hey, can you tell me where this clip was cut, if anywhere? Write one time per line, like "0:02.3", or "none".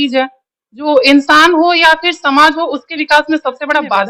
none